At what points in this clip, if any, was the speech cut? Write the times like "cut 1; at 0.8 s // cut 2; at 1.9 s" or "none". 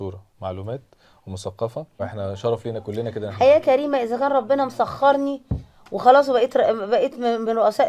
cut 1; at 2.0 s